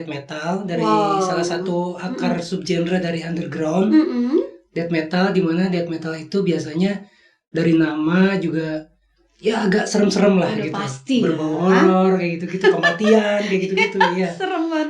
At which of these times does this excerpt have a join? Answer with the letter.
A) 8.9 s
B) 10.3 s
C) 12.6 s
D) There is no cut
D